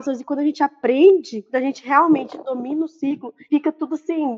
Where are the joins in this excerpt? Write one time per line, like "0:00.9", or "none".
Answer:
none